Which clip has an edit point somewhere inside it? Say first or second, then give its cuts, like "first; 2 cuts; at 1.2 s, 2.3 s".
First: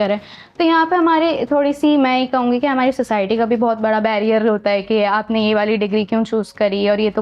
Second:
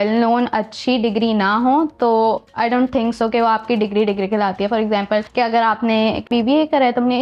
second; 3 cuts; at 2.5 s, 5.3 s, 6.3 s